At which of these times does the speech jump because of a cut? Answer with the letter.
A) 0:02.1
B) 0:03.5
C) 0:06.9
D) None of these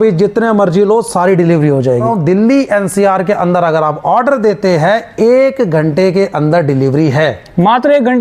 A